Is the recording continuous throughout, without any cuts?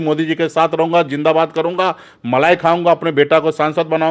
yes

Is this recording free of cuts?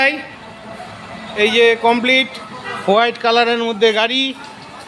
yes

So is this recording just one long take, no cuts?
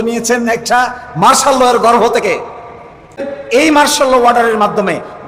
no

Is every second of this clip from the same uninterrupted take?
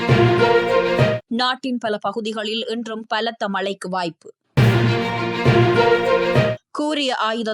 no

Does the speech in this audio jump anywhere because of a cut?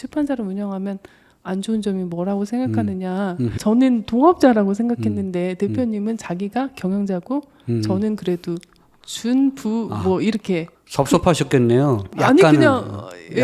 yes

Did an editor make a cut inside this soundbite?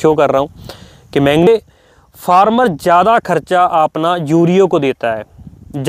yes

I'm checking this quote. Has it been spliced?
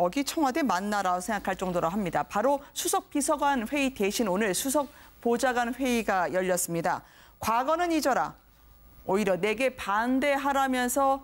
no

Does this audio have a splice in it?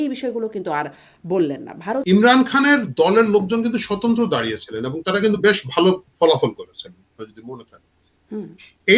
yes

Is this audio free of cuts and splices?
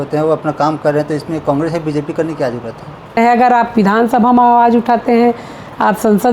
no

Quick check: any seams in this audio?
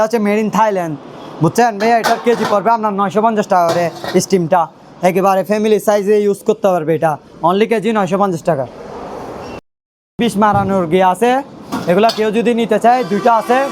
no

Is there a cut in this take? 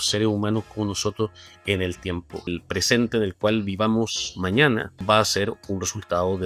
yes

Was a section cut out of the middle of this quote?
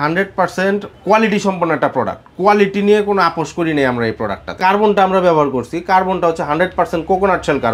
yes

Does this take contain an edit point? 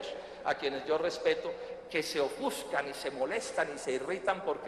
no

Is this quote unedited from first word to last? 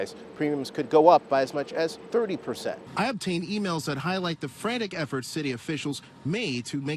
no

